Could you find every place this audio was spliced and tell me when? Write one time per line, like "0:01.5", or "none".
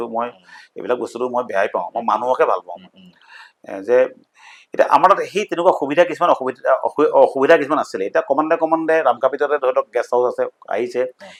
none

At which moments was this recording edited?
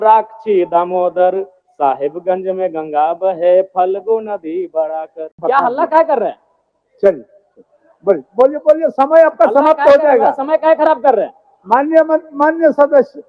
0:05.3

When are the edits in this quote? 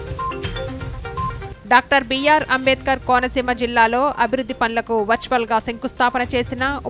0:01.4

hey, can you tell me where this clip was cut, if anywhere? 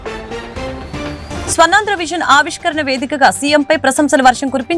0:01.2

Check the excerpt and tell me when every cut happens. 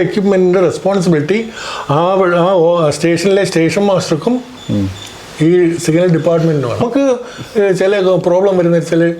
0:06.8

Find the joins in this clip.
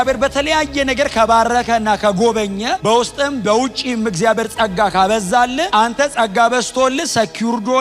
none

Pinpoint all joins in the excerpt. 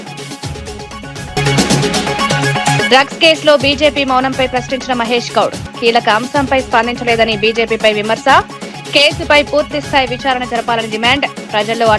none

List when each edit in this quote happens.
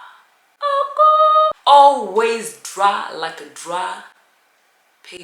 0:01.6

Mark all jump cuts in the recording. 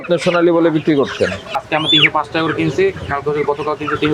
0:01.6

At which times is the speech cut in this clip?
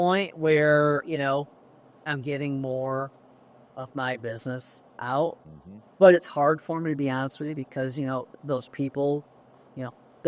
none

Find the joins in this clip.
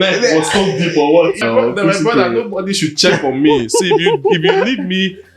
0:01.4

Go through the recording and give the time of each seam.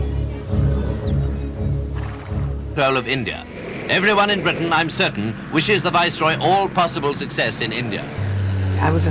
none

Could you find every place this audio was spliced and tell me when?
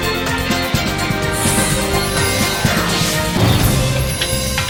none

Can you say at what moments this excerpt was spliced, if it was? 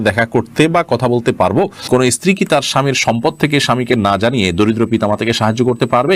0:02.1

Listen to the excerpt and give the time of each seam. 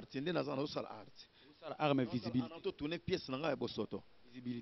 none

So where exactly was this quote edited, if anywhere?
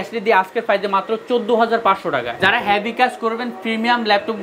0:02.3

